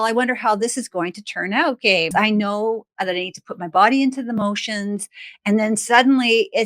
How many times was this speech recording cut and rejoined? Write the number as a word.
one